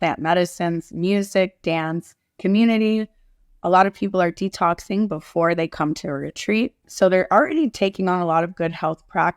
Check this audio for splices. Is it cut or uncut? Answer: cut